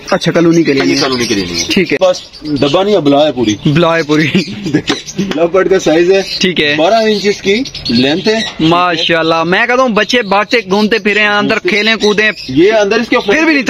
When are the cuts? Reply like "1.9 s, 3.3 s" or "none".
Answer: 2.0 s